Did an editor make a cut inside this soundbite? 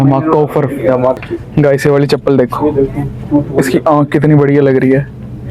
yes; 1 cut; at 1.2 s

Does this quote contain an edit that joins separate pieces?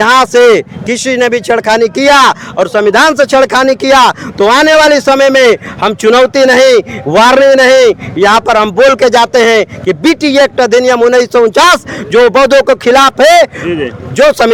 no; 0 cuts

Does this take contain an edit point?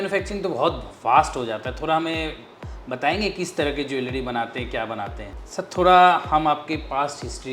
yes; 1 cut; at 5.2 s

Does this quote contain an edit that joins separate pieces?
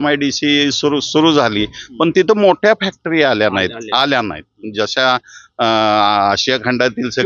no; 0 cuts

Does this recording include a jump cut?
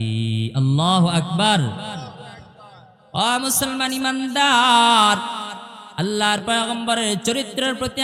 yes; 1 cut; at 2.9 s

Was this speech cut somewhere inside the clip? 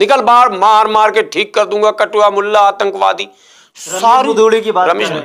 no; 0 cuts

